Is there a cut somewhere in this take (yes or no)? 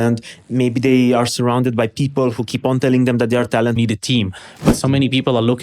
yes